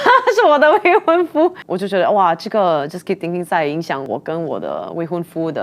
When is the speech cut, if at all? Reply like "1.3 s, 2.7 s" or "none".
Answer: 1.7 s, 4.0 s